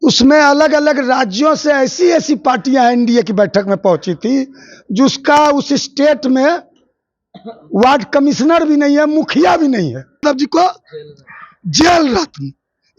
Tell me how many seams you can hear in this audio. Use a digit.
1